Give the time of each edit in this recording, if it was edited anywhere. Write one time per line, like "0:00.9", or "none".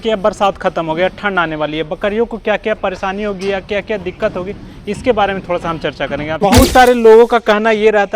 0:06.2